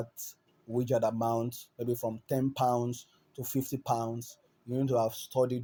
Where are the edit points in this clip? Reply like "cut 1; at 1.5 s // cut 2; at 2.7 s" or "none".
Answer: none